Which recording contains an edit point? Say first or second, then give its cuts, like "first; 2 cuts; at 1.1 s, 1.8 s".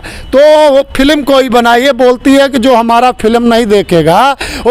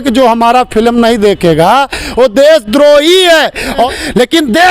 second; 1 cut; at 3.8 s